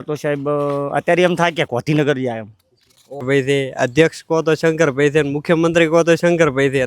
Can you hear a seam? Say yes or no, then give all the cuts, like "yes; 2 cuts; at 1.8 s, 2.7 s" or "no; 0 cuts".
yes; 1 cut; at 3.2 s